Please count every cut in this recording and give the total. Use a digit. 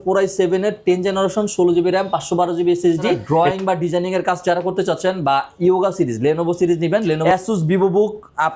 2